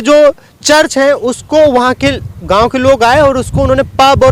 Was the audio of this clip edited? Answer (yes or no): no